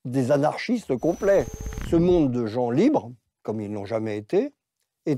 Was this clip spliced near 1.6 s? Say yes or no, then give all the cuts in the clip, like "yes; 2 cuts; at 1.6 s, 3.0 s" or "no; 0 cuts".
yes; 1 cut; at 1.6 s